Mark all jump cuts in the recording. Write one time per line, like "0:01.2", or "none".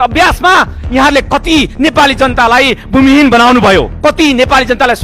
0:03.9